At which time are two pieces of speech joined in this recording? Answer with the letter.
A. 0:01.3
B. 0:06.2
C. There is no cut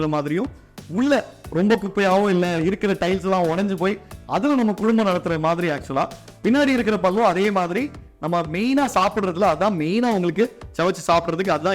B